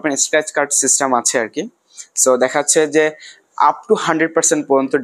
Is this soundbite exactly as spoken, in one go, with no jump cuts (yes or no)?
yes